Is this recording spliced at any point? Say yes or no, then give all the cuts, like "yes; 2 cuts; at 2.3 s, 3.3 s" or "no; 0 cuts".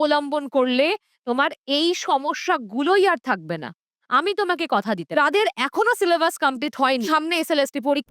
yes; 2 cuts; at 5.0 s, 7.0 s